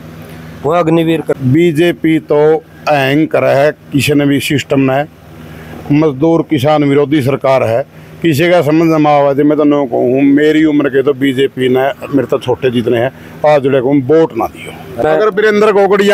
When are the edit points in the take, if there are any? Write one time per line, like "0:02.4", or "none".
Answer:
0:01.4
0:15.0